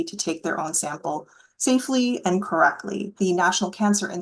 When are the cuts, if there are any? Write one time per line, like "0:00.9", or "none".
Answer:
0:03.1